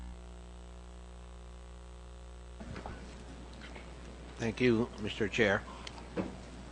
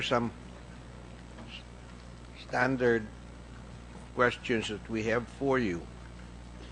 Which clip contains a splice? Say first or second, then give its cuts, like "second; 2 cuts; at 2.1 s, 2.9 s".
first; 1 cut; at 1.1 s